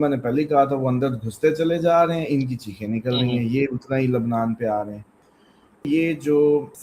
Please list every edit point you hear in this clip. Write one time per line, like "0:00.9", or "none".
0:05.9